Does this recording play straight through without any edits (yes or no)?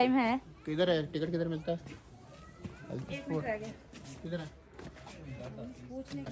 yes